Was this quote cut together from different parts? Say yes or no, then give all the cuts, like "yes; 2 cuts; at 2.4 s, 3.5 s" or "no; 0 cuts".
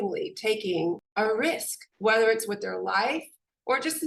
yes; 1 cut; at 1.0 s